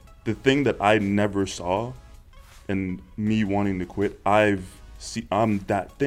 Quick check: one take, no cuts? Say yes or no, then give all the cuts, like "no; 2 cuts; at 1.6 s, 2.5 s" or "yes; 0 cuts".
yes; 0 cuts